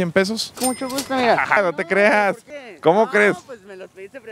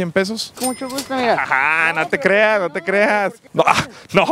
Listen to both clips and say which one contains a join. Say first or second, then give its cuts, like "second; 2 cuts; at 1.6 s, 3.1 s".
first; 2 cuts; at 1.6 s, 2.5 s